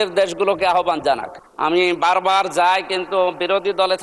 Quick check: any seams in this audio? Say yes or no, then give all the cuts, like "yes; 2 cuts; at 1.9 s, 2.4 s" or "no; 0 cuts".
yes; 1 cut; at 1.4 s